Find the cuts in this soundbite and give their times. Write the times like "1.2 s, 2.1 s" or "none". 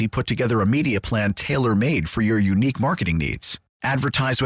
none